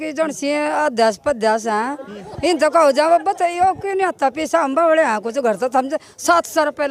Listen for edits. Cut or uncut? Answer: uncut